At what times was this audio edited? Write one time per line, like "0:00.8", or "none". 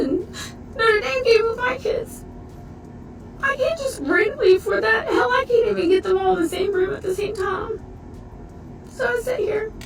none

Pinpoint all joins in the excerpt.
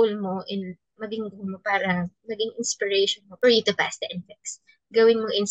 none

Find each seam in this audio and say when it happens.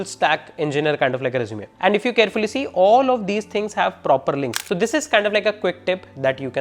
0:01.6
0:04.5

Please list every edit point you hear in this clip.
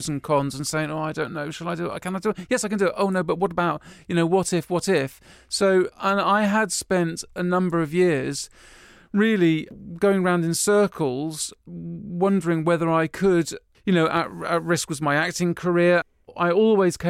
0:16.1

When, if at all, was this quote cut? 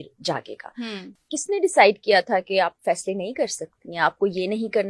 0:01.0

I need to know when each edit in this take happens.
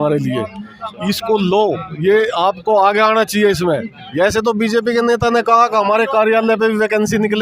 0:04.0

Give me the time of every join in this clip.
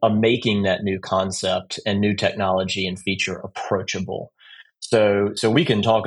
none

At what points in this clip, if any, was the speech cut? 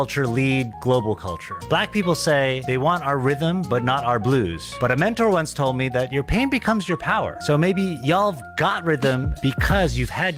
none

